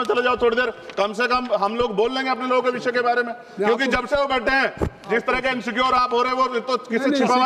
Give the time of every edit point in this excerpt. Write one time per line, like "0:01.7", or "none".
none